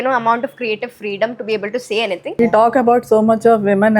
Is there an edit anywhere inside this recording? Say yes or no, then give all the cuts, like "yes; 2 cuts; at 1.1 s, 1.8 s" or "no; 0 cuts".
yes; 1 cut; at 2.4 s